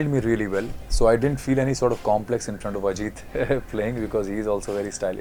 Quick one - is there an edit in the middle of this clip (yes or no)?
no